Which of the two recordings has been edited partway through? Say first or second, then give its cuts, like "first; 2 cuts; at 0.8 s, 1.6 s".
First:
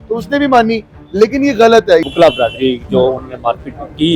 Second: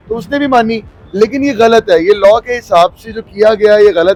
first; 1 cut; at 2.0 s